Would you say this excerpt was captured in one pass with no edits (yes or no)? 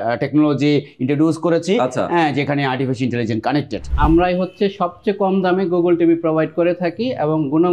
no